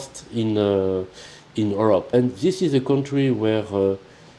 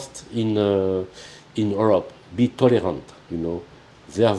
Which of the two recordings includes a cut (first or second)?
first